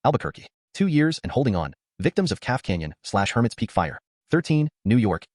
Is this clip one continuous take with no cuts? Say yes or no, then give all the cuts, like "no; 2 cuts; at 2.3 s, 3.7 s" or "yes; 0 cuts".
no; 1 cut; at 4.1 s